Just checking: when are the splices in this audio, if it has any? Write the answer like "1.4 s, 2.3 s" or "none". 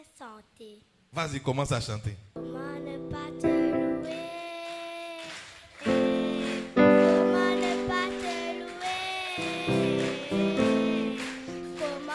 2.4 s